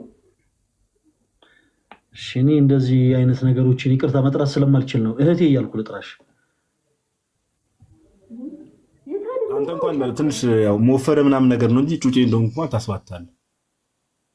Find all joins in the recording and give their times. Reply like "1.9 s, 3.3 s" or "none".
10.0 s